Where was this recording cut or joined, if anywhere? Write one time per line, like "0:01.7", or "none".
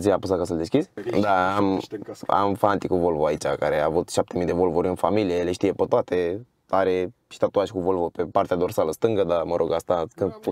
none